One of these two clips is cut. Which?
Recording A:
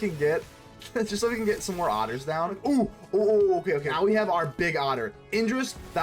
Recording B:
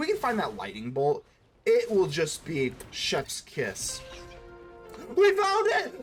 A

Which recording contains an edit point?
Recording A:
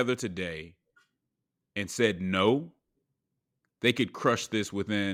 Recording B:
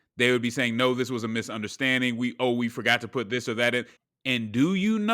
B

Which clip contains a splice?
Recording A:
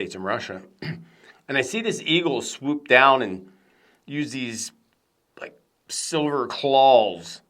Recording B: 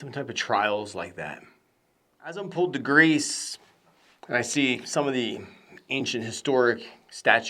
B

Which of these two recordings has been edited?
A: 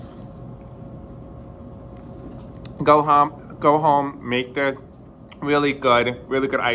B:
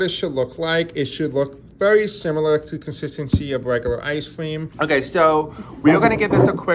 B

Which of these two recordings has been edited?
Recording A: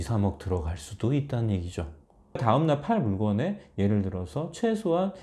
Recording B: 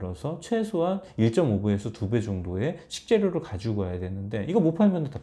A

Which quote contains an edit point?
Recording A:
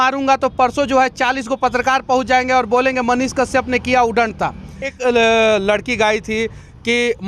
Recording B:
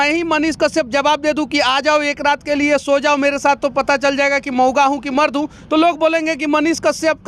A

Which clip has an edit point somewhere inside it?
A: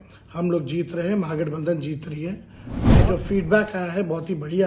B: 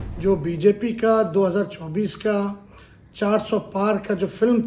A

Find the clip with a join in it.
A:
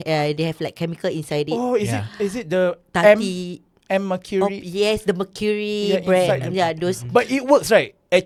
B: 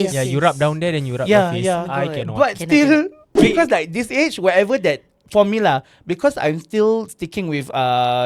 B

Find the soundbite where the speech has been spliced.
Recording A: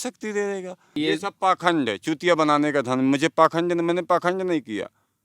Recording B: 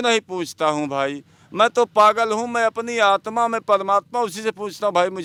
A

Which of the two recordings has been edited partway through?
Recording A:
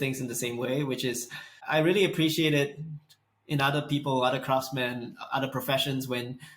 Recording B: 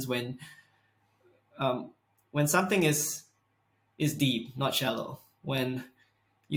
A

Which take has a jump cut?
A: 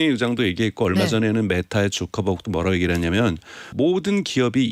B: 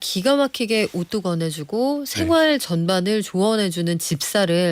A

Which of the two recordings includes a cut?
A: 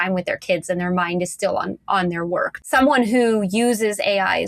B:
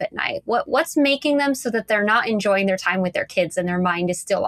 A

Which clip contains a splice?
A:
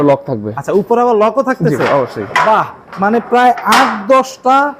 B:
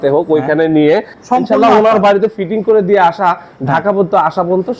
B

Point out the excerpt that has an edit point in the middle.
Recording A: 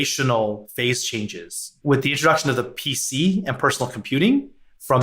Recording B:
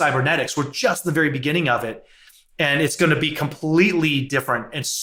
A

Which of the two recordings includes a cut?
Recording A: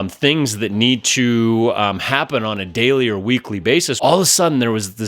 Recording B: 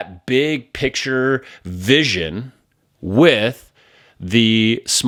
A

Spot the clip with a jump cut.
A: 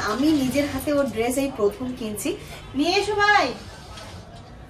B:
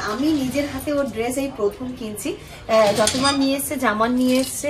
A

